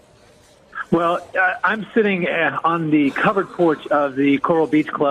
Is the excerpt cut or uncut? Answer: cut